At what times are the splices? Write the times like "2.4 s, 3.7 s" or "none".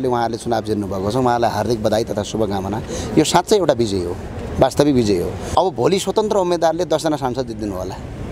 5.5 s